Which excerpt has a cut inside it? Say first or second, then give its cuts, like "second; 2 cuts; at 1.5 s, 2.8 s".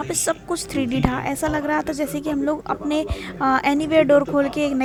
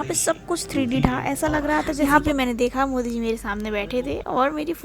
second; 1 cut; at 2.0 s